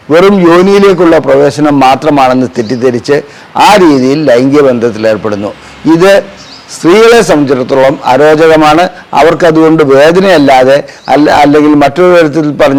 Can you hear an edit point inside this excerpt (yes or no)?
no